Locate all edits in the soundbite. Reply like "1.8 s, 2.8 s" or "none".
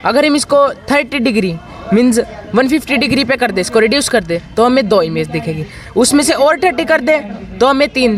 none